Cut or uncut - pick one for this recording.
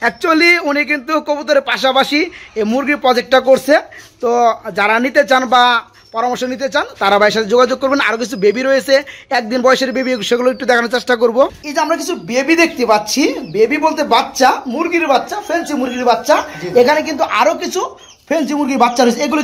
uncut